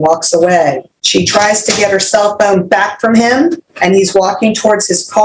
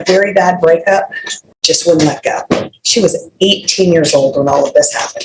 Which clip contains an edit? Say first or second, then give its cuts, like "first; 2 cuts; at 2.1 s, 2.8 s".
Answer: first; 2 cuts; at 0.9 s, 3.7 s